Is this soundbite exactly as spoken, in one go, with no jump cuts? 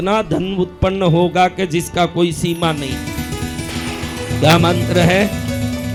yes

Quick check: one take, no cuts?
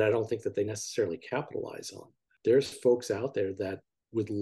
no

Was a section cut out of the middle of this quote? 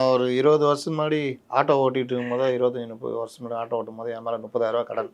no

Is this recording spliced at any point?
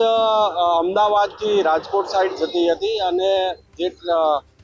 no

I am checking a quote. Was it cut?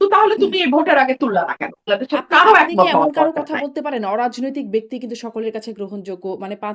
yes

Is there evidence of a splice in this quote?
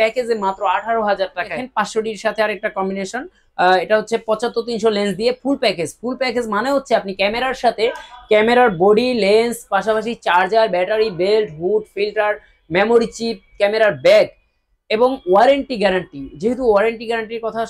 yes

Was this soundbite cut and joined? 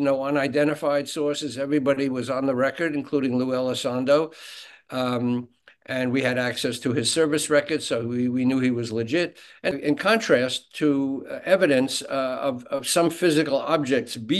yes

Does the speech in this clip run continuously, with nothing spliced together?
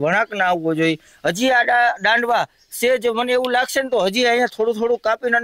yes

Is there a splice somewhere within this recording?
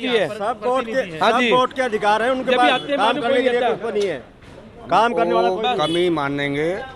no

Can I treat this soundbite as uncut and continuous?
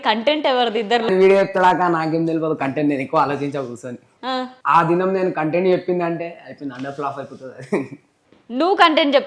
no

